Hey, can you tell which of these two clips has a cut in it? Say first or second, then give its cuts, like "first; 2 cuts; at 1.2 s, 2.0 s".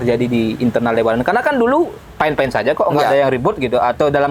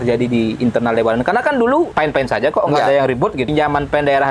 second; 2 cuts; at 1.9 s, 3.5 s